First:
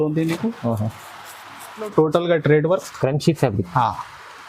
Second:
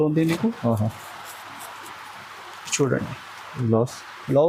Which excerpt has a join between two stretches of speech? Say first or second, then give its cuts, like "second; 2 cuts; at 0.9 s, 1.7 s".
first; 1 cut; at 1.9 s